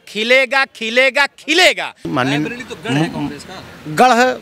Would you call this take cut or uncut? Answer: cut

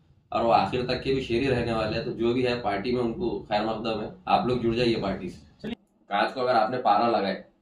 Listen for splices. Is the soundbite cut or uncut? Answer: cut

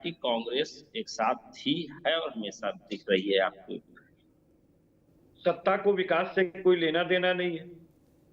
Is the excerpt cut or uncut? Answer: cut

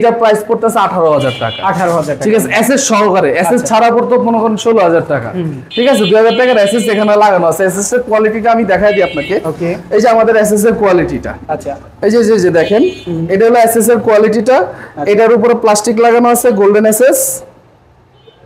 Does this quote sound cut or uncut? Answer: uncut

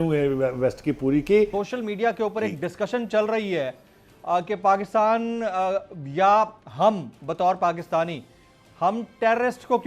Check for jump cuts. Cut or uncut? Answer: cut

